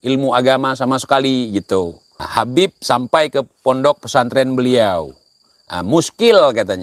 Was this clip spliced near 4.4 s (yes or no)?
no